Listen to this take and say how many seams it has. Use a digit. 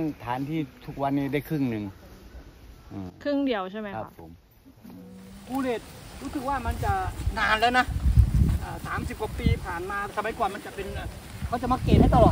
2